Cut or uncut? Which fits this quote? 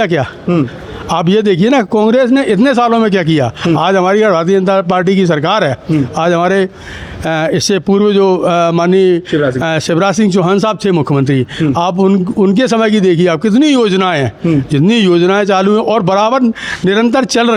uncut